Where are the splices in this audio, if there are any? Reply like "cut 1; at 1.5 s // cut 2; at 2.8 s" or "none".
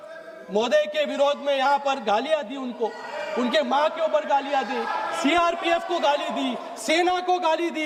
none

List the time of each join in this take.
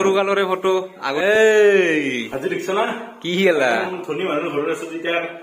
cut 1; at 1.1 s

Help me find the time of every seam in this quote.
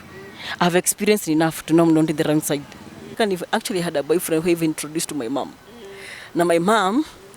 cut 1; at 3.1 s

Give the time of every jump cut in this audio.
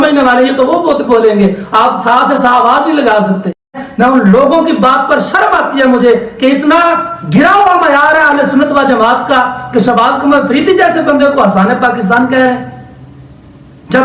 cut 1; at 3.9 s

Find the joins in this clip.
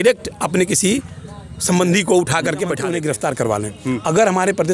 cut 1; at 2.9 s

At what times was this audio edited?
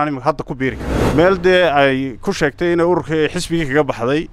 cut 1; at 0.9 s

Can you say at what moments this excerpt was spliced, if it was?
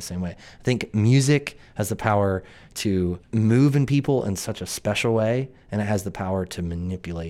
cut 1; at 3.2 s

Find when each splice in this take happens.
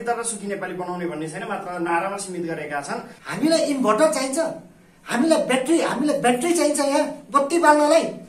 cut 1; at 3.1 s

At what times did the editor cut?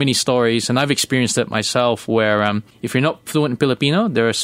cut 1; at 2.7 s

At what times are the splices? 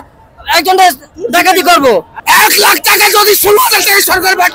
cut 1; at 2.1 s

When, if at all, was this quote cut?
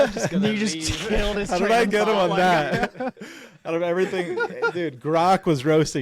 none

